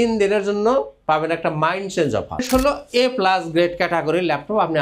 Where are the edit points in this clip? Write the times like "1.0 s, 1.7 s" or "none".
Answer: 2.4 s